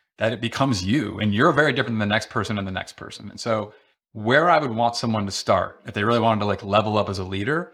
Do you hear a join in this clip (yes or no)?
no